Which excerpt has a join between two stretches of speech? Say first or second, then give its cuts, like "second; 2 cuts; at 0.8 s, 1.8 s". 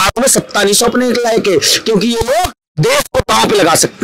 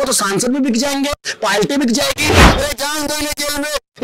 second; 1 cut; at 2.5 s